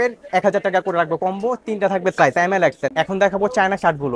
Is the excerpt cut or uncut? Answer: cut